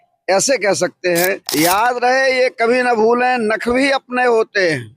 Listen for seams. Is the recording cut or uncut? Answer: cut